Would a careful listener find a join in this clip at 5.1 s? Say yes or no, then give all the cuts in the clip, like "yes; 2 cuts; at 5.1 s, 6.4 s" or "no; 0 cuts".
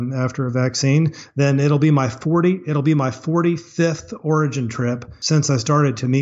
yes; 1 cut; at 5.1 s